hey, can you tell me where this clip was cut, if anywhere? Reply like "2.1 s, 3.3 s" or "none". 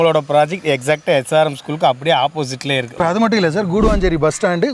2.9 s